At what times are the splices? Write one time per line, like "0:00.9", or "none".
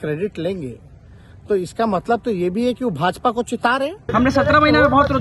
0:04.0